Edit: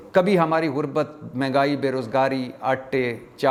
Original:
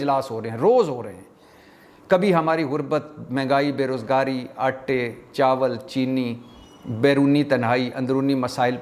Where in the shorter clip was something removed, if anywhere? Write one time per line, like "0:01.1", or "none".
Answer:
none